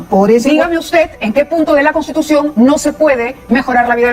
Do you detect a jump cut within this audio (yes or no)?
no